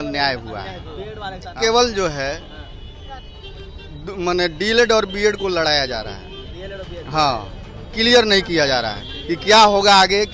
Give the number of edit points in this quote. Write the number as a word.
one